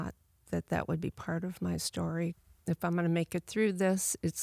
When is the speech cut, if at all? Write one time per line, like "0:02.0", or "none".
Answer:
0:02.5